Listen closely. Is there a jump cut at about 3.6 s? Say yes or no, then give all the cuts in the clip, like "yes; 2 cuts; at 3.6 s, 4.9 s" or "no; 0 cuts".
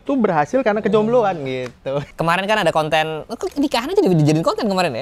no; 1 cut; at 2.1 s